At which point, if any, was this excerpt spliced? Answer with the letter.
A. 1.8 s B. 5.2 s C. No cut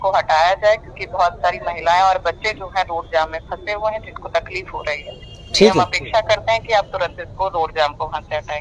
C